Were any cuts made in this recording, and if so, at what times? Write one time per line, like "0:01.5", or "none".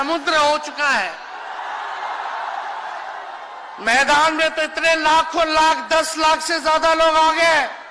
none